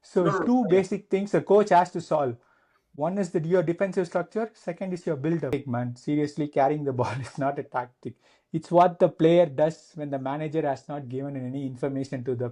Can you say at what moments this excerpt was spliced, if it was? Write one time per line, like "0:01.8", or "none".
0:05.5